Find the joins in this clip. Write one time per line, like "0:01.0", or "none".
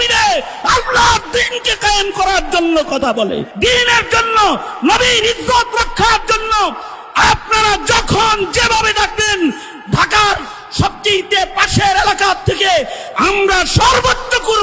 0:03.5